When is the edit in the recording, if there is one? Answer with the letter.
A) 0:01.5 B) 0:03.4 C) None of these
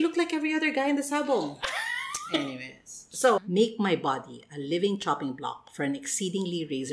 B